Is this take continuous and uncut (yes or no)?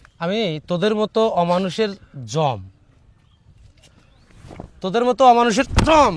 yes